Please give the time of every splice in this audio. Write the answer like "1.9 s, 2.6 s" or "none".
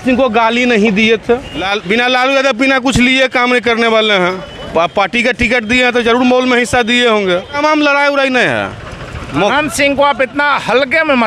1.7 s, 7.5 s